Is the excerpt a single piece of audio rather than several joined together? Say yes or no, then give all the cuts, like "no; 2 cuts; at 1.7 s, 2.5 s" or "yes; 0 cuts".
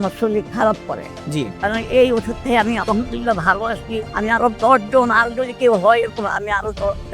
no; 1 cut; at 1.6 s